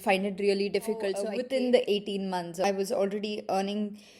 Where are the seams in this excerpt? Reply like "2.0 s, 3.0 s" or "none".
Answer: 1.3 s, 2.6 s

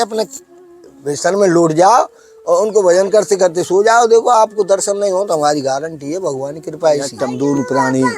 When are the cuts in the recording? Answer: 7.2 s

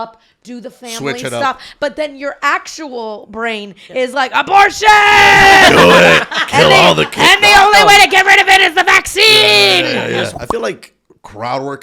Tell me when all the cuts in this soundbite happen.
10.3 s

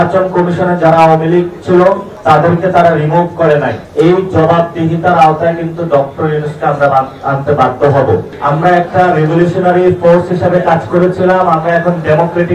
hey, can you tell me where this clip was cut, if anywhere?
3.8 s, 8.3 s

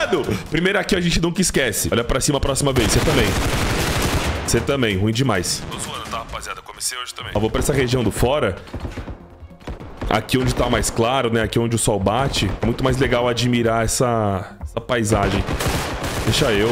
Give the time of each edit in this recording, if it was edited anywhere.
1.8 s, 5.5 s, 7.2 s

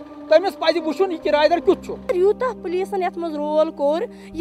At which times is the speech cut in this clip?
2.1 s

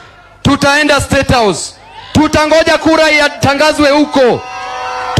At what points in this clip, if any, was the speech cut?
none

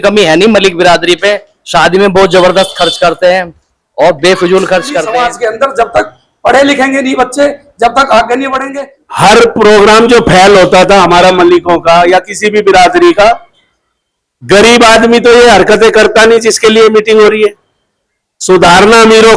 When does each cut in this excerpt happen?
5.1 s, 8.7 s

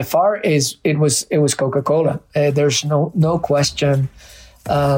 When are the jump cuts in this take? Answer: none

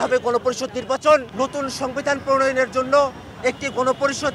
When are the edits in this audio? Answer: 1.3 s

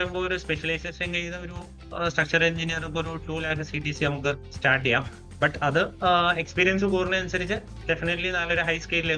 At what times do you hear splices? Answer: none

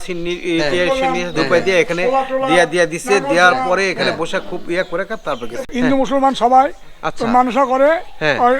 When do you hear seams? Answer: 5.7 s

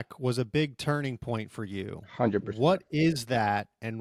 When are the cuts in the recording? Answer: none

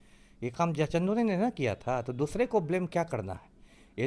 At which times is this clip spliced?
none

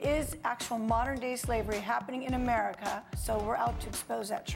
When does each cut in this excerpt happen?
3.2 s

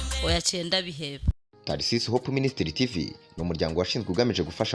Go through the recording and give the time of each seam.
1.4 s

